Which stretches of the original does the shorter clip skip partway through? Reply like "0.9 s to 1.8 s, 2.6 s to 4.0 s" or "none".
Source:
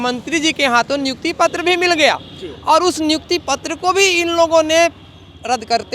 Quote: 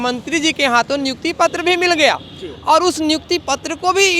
none